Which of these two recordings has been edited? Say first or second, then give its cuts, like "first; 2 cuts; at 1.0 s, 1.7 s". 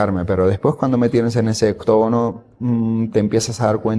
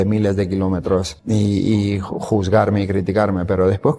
second; 1 cut; at 1.1 s